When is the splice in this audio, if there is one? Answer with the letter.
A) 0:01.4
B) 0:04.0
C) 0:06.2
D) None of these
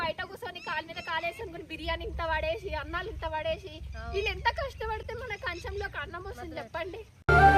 D